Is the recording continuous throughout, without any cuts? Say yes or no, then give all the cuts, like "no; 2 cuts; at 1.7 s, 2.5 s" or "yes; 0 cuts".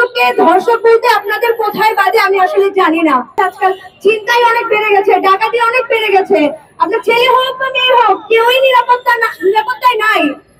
yes; 0 cuts